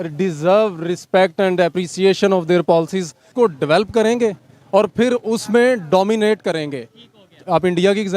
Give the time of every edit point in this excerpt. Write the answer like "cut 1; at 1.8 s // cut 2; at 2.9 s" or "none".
cut 1; at 3.2 s